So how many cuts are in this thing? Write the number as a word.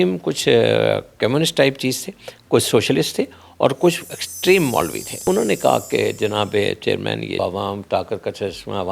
two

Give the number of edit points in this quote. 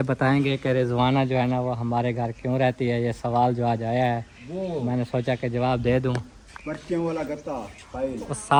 zero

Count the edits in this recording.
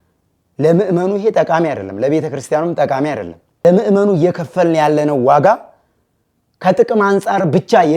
one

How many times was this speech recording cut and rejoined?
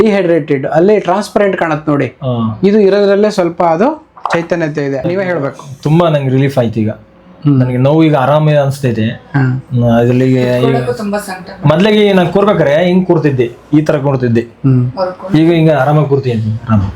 one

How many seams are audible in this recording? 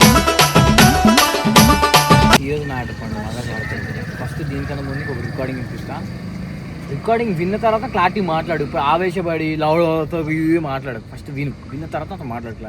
one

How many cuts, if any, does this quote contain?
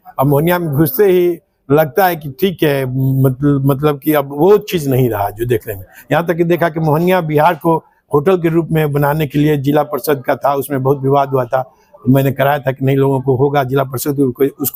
zero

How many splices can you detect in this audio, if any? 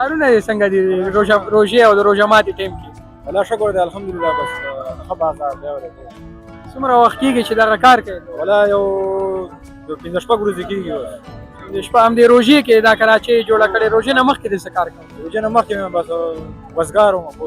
zero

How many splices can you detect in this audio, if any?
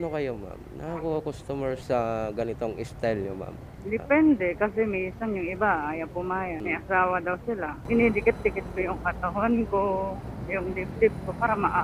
three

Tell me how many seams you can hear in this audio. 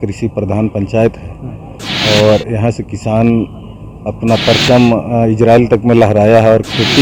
zero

